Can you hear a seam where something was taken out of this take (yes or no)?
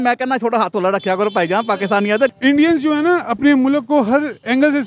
yes